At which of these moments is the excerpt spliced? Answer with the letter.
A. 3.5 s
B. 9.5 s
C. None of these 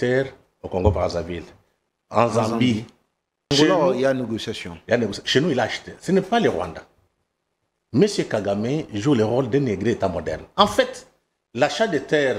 A